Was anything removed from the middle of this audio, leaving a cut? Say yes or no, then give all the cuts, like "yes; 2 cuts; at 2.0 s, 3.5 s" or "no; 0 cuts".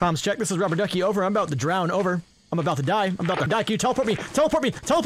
yes; 1 cut; at 3.5 s